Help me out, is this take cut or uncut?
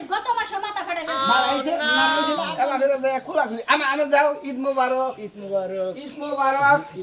cut